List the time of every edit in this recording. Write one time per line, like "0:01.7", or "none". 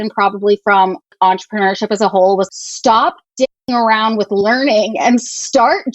0:01.1
0:02.5